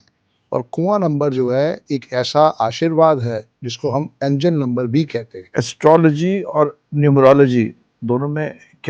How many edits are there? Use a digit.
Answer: 1